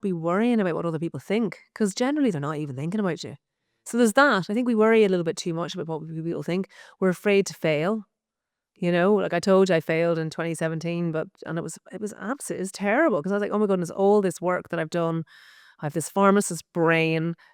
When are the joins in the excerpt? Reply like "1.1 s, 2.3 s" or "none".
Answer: none